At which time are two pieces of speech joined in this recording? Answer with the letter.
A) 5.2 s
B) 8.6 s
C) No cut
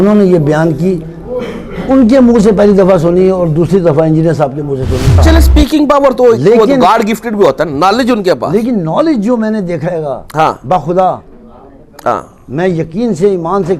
A